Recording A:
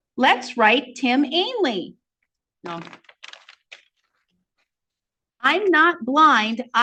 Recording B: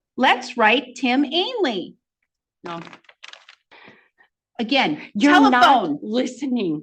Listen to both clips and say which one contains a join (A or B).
B